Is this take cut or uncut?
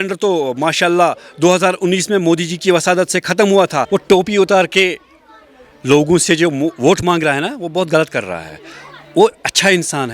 cut